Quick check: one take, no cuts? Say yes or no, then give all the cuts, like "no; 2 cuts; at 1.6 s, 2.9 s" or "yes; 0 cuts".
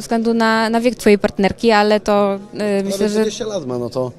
yes; 0 cuts